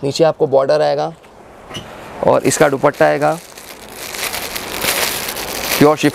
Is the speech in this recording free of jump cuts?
yes; 0 cuts

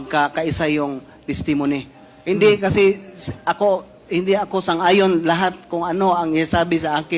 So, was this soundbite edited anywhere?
yes; 1 cut; at 0.9 s

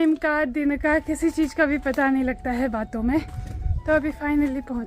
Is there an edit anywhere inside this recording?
no; 0 cuts

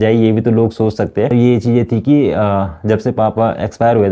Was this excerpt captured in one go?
no; 1 cut; at 1.3 s

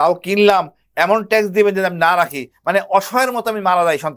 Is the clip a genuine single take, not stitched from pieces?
yes; 0 cuts

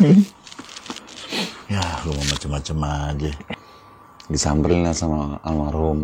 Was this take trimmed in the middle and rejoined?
yes; 1 cut; at 3.5 s

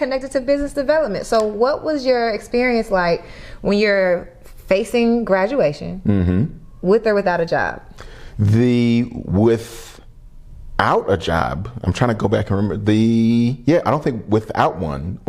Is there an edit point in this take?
no; 0 cuts

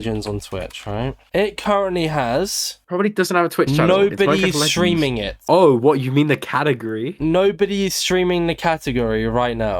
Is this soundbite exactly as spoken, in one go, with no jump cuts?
yes; 0 cuts

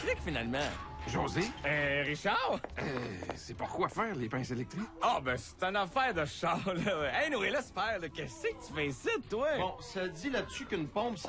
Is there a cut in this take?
yes; 1 cut; at 9.4 s

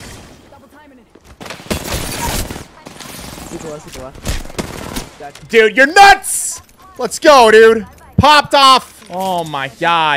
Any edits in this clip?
no; 0 cuts

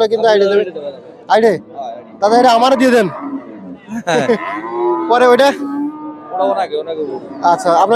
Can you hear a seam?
no; 0 cuts

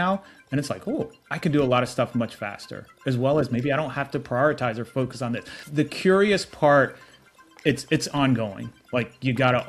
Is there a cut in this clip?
yes; 2 cuts; at 1.2 s, 5.6 s

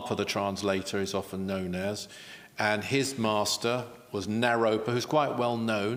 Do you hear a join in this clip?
no; 0 cuts

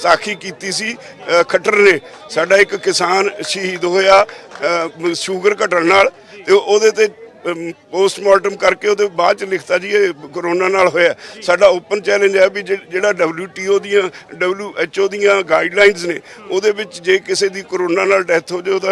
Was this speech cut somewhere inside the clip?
no; 0 cuts

